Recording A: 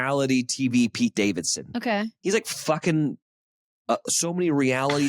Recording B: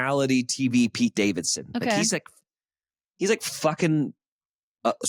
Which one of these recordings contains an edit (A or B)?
A